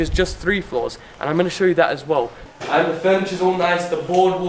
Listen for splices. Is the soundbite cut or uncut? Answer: cut